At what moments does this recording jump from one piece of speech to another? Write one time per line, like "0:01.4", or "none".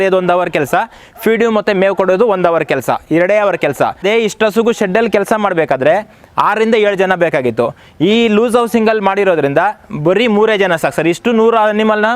0:04.0

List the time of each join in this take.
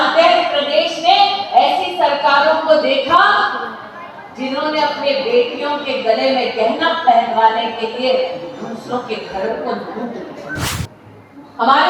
0:10.7

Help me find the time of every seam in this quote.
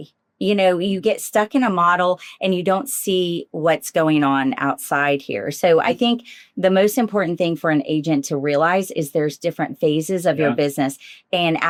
none

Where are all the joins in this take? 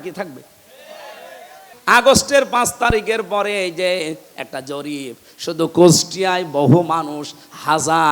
0:01.7
0:04.3

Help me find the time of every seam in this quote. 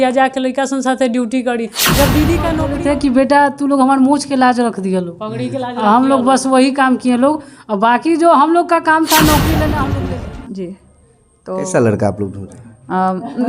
0:02.6
0:09.9

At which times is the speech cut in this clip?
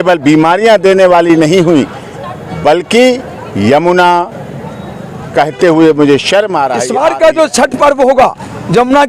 0:06.8

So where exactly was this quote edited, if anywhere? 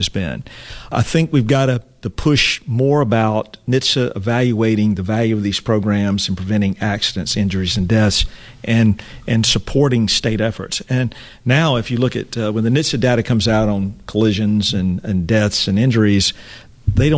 0:00.9

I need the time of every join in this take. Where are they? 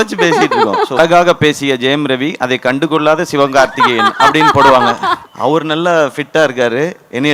0:01.0
0:05.3

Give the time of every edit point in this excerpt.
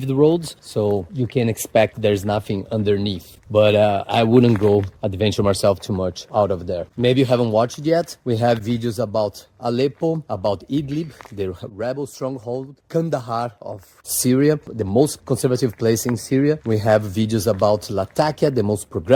none

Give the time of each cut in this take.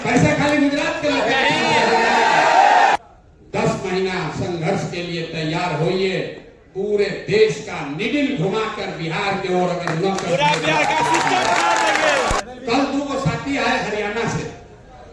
0:03.0
0:12.4

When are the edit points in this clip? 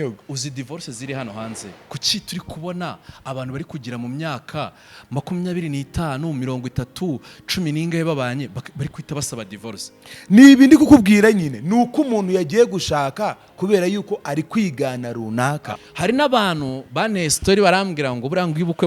0:15.8

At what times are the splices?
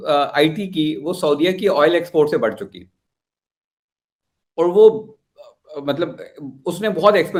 none

